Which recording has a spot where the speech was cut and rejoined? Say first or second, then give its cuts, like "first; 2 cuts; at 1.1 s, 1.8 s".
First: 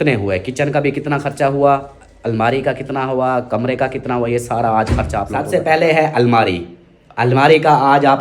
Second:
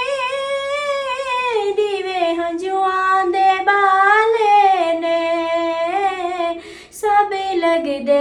first; 1 cut; at 5.4 s